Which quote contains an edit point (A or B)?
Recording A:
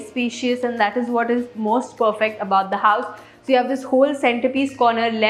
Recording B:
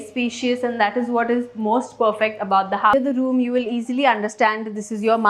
B